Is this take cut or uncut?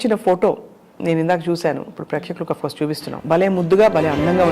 cut